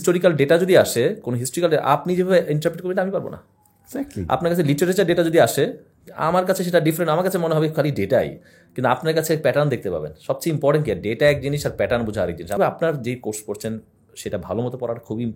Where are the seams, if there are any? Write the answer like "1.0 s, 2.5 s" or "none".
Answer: 12.6 s